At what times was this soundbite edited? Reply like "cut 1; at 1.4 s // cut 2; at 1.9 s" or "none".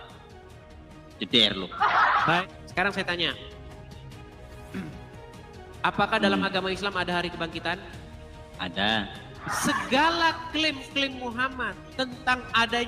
cut 1; at 2.4 s // cut 2; at 9.4 s